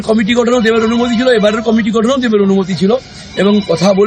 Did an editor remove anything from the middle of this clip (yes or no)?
no